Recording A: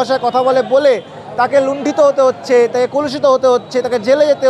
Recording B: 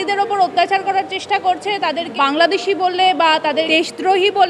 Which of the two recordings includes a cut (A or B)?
B